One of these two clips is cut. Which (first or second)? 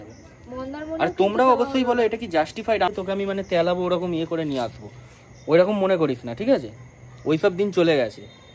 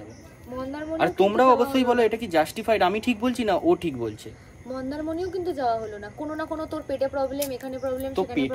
first